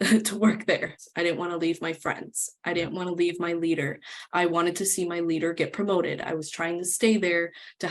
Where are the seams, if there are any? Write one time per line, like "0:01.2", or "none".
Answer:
0:01.0